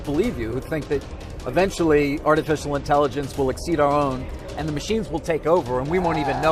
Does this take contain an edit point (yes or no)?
no